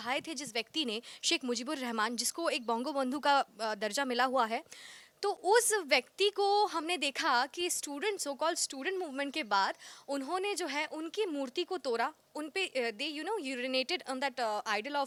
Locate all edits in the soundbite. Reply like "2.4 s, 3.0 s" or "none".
none

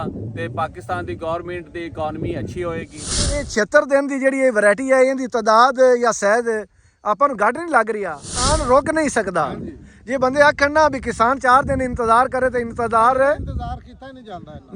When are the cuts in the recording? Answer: 3.3 s, 8.5 s

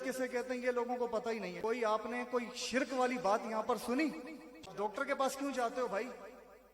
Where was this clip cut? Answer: 1.5 s, 4.7 s

